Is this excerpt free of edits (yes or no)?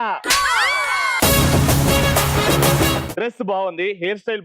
no